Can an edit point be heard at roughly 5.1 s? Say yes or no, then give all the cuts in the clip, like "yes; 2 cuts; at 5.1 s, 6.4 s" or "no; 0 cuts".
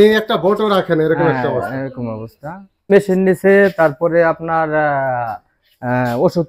no; 1 cut; at 2.9 s